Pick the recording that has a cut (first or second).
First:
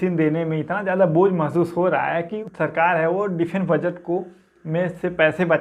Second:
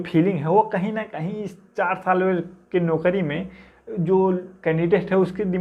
first